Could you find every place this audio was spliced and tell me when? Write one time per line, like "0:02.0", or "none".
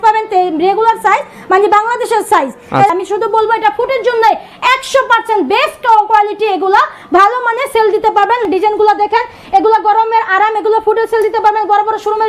0:02.9
0:08.4